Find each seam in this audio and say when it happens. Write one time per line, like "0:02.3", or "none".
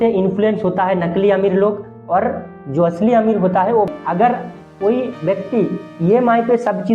0:03.9